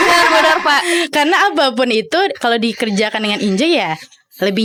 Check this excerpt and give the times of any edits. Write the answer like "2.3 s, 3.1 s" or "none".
none